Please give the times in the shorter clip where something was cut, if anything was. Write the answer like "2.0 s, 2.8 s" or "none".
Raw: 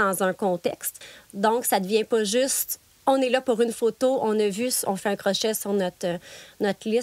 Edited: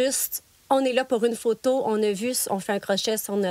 none